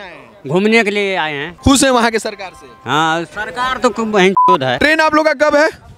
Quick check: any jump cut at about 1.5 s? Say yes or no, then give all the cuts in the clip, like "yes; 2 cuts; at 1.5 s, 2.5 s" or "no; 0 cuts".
yes; 2 cuts; at 1.5 s, 4.8 s